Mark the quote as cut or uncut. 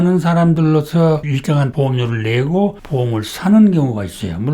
cut